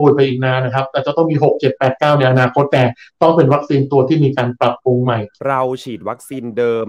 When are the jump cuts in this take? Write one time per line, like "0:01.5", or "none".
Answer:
0:05.3